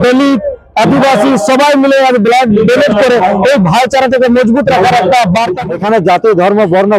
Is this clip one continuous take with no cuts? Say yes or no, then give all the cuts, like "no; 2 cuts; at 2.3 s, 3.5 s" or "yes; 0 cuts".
no; 1 cut; at 5.6 s